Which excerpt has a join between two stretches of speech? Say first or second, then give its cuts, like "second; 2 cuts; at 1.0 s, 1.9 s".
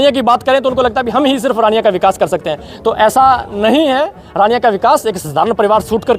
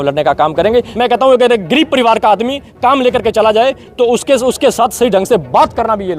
second; 1 cut; at 0.9 s